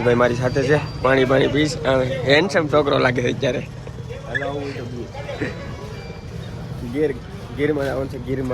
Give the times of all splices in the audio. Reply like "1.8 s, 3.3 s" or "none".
none